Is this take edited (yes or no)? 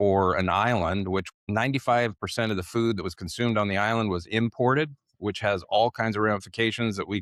yes